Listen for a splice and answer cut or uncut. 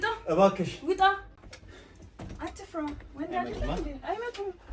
cut